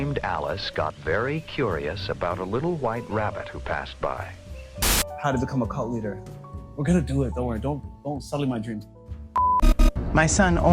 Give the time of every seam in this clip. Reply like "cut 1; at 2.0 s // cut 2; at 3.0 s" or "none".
cut 1; at 5.0 s // cut 2; at 9.6 s